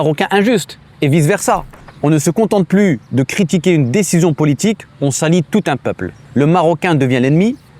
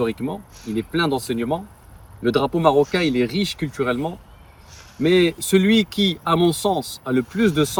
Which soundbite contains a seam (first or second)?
first